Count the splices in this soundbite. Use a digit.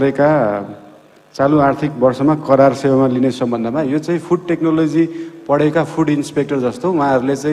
0